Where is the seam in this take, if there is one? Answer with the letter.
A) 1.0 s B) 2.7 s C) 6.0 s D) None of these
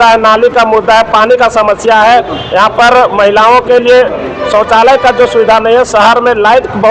D